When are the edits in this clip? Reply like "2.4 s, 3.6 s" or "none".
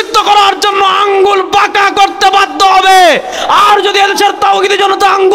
none